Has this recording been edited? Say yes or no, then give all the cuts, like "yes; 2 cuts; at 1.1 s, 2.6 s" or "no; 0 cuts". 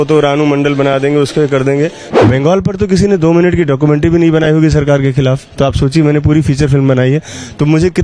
yes; 1 cut; at 2.0 s